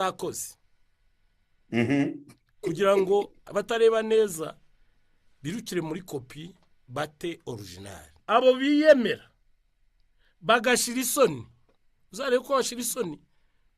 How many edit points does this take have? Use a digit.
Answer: 2